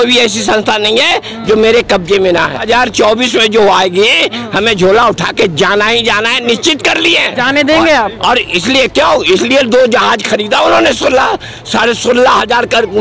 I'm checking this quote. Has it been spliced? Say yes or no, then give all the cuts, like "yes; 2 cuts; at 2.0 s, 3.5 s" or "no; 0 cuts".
yes; 1 cut; at 2.6 s